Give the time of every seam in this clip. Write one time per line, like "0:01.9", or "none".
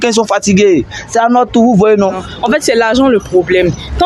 0:02.3